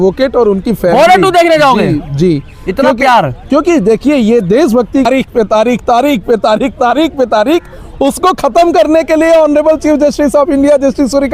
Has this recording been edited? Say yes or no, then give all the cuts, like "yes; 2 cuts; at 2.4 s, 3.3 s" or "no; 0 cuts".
yes; 1 cut; at 5.1 s